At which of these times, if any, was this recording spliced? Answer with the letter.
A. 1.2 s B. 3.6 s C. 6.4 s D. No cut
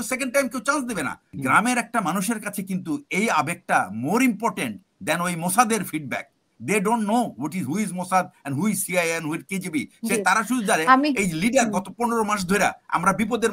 A